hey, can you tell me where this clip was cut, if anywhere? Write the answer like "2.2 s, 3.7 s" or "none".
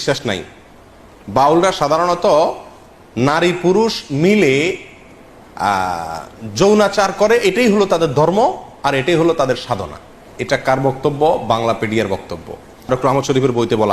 12.9 s